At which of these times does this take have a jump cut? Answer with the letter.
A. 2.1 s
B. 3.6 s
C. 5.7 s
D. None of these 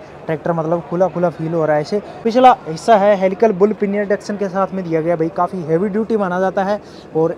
A